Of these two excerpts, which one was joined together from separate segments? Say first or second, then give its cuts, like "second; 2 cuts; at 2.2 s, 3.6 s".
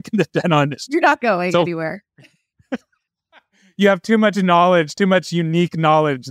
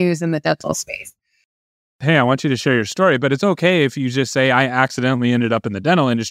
second; 1 cut; at 1.7 s